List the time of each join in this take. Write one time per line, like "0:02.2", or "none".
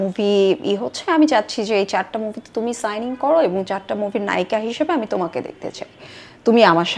none